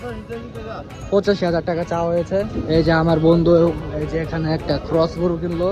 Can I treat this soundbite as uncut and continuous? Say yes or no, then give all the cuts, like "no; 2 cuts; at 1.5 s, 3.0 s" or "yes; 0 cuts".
no; 1 cut; at 2.6 s